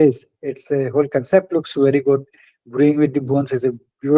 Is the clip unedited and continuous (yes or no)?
yes